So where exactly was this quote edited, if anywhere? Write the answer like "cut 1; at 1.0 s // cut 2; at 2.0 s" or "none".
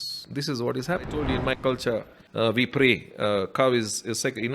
cut 1; at 1.2 s // cut 2; at 2.2 s